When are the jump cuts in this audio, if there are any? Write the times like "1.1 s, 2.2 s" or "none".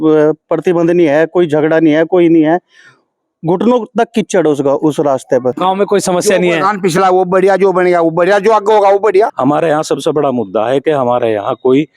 5.6 s, 9.4 s